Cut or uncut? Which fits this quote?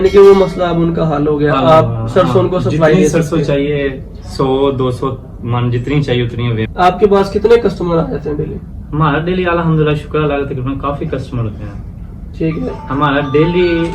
cut